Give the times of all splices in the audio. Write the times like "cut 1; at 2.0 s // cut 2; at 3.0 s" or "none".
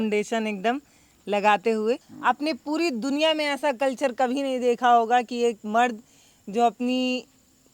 cut 1; at 2.1 s